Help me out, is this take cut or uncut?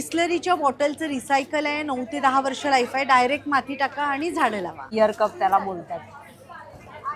cut